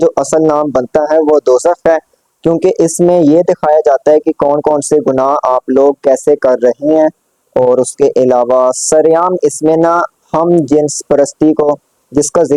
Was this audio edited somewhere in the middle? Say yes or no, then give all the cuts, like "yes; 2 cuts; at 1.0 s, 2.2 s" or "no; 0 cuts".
no; 0 cuts